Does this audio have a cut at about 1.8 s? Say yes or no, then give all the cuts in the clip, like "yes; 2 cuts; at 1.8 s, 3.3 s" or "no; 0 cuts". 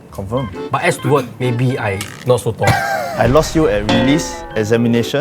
no; 1 cut; at 3.1 s